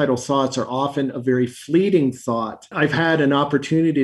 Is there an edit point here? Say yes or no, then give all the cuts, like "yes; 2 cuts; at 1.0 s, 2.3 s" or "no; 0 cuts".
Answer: yes; 1 cut; at 2.6 s